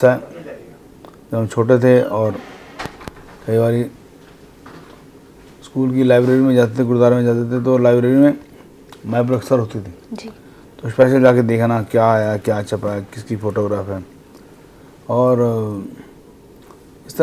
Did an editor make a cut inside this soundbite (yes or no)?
no